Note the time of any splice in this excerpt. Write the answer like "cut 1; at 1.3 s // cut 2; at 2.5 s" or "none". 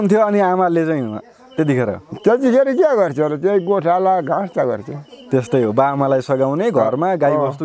none